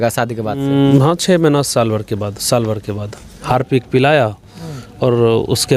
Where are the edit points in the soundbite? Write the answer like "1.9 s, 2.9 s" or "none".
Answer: 0.9 s, 3.3 s